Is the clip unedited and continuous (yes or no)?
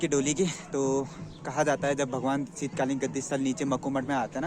yes